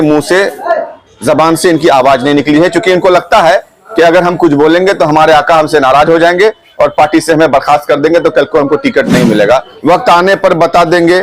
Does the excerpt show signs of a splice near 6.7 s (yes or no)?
no